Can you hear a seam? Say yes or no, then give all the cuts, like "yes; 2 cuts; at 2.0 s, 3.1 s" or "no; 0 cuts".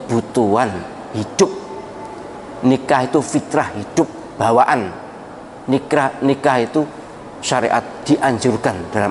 no; 0 cuts